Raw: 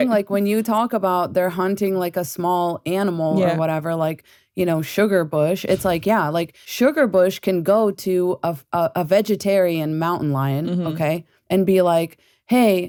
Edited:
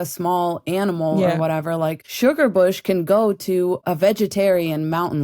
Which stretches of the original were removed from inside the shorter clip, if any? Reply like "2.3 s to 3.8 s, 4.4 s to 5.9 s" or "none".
4.2 s to 6.6 s, 8.4 s to 8.9 s